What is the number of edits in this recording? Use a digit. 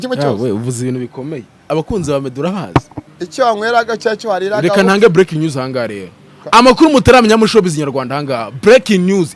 1